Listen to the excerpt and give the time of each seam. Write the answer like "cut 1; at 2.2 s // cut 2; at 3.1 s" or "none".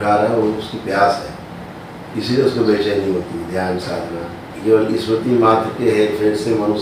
cut 1; at 4.5 s